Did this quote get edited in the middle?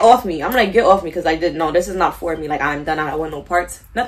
no; 0 cuts

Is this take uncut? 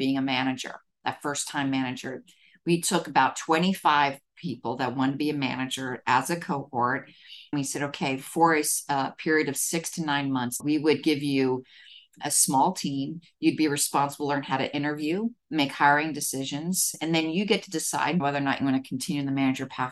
no; 5 cuts; at 7.5 s, 10.6 s, 12.2 s, 16.9 s, 18.2 s

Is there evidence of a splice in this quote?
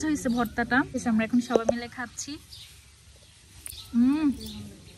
yes; 1 cut; at 1.0 s

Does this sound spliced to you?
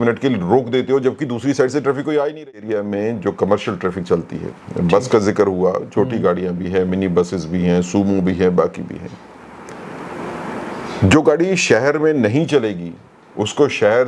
yes; 1 cut; at 2.7 s

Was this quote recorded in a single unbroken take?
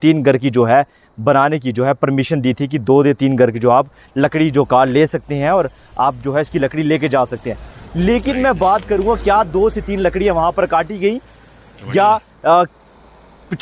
yes; 0 cuts

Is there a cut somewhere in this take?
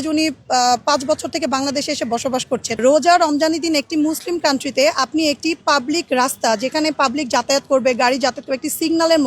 yes; 1 cut; at 2.8 s

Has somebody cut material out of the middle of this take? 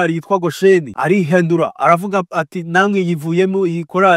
yes; 1 cut; at 0.9 s

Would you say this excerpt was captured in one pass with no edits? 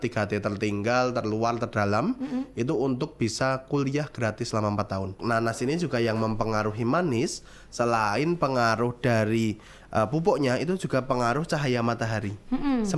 no; 1 cut; at 5.2 s

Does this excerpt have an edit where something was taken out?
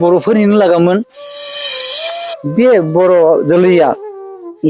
yes; 1 cut; at 0.9 s

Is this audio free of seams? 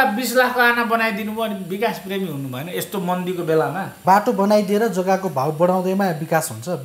no; 1 cut; at 4.0 s

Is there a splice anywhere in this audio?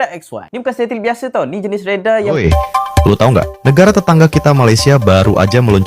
yes; 1 cut; at 2.4 s

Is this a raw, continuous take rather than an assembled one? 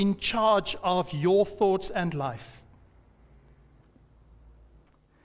yes; 0 cuts

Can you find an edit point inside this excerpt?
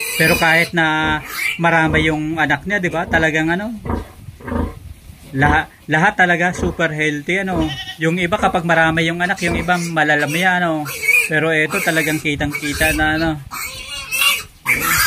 no; 0 cuts

